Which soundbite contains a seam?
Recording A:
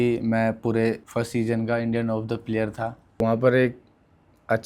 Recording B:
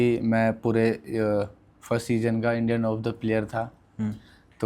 A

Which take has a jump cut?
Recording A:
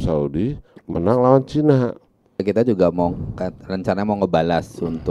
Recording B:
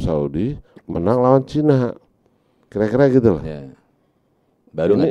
A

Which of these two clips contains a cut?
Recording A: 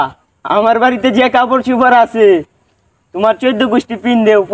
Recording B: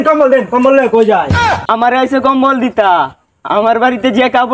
B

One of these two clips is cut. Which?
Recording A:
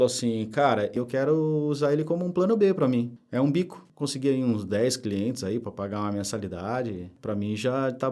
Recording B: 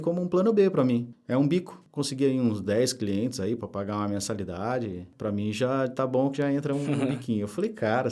A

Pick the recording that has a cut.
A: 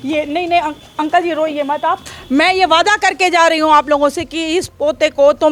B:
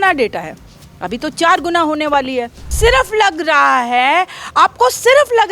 B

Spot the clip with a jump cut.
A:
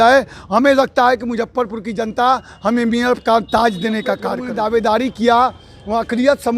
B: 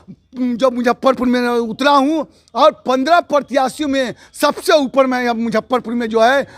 A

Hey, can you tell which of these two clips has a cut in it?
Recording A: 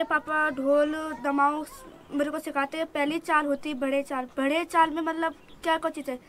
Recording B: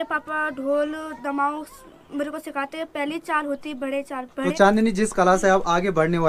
B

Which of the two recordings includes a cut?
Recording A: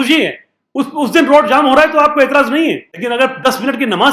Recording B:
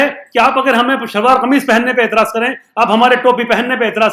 A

